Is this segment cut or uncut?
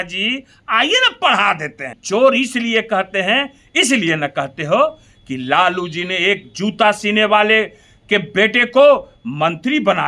cut